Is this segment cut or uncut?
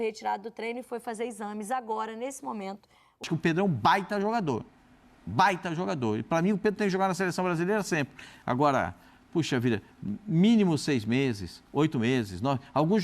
cut